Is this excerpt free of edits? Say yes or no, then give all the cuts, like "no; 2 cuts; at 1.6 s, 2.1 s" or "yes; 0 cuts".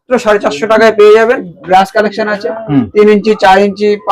no; 1 cut; at 1.5 s